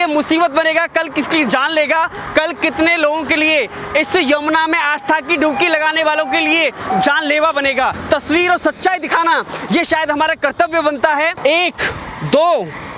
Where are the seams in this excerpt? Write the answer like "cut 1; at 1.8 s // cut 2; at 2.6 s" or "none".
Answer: cut 1; at 8.0 s // cut 2; at 11.3 s